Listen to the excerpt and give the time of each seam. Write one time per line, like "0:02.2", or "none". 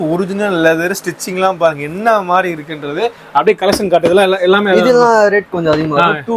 none